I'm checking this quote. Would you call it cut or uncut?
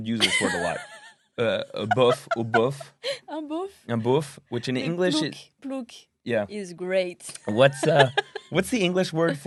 uncut